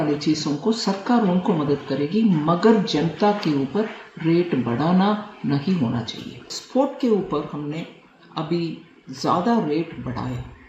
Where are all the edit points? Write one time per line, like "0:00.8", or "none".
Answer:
0:06.5